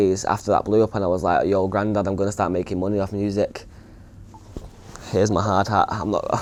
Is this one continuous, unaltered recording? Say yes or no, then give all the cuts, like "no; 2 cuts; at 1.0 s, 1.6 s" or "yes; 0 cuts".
yes; 0 cuts